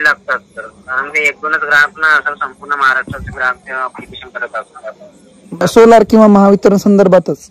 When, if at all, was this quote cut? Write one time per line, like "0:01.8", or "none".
0:05.7